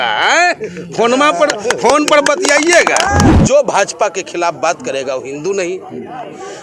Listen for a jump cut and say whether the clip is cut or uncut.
cut